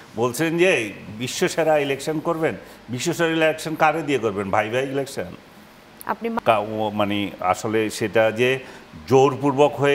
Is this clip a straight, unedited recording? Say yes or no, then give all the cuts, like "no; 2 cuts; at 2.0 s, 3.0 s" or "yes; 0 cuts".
no; 1 cut; at 6.4 s